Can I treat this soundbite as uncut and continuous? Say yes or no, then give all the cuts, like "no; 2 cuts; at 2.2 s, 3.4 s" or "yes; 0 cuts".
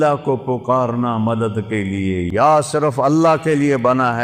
no; 1 cut; at 2.3 s